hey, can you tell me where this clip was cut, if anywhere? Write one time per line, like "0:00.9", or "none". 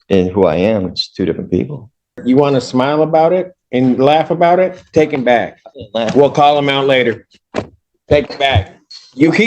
0:02.2